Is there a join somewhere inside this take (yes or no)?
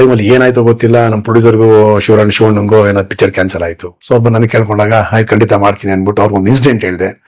yes